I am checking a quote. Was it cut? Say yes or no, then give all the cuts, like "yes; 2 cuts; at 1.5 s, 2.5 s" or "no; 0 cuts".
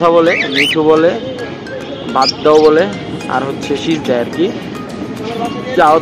no; 0 cuts